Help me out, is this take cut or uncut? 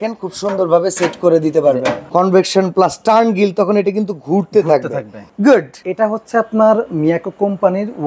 cut